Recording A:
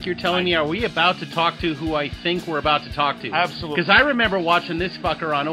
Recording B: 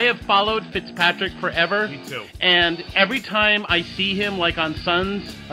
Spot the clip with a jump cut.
A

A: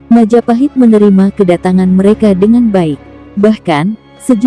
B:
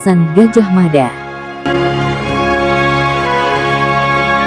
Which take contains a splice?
B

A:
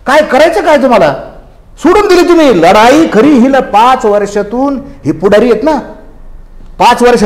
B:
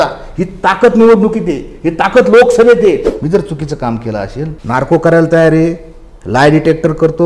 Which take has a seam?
B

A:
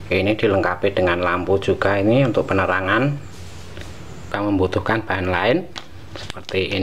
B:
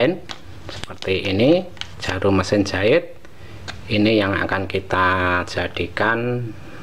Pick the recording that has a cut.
A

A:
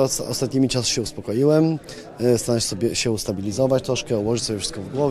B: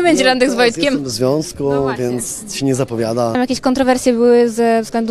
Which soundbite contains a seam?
B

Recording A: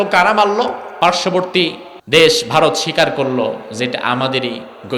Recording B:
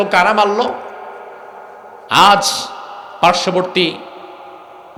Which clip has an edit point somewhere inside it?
A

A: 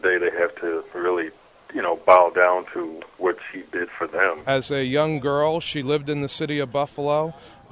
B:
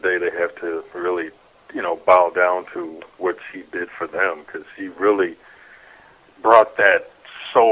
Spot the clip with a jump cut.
A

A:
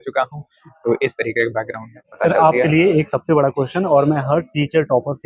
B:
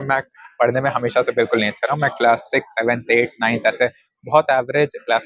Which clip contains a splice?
A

